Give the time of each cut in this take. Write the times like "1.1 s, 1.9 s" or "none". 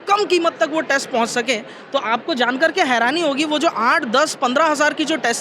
none